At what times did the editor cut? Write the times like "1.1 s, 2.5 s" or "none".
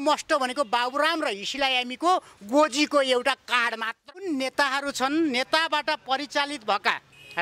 4.0 s

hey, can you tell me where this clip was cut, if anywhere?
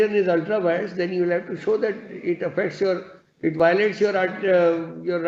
none

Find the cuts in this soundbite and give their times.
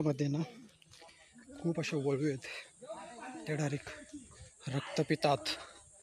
none

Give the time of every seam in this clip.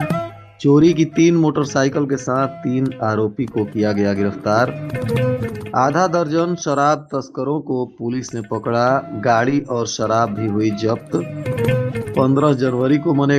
none

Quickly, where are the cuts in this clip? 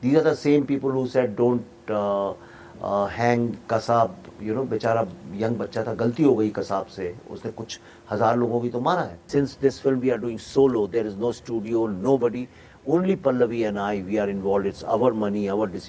9.2 s

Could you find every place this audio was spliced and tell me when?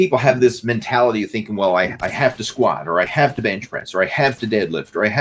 none

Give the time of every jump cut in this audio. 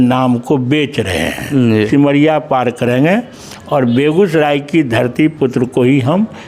1.9 s

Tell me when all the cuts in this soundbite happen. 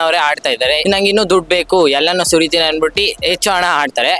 0.8 s, 3.2 s

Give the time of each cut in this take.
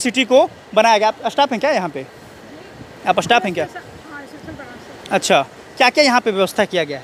none

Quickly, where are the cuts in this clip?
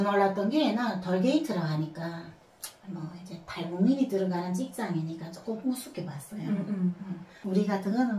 none

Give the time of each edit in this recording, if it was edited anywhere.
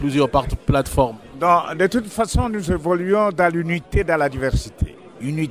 none

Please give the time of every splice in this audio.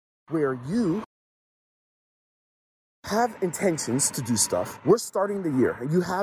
none

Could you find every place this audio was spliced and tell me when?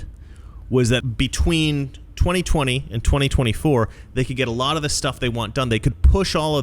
1.0 s

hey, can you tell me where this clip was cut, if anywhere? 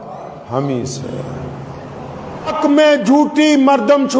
2.6 s

